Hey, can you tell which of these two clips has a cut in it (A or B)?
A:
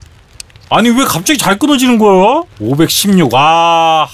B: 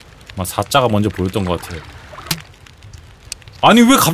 A